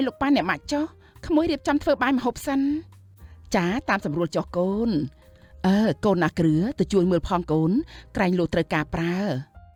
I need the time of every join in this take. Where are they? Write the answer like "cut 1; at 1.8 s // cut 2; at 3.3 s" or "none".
none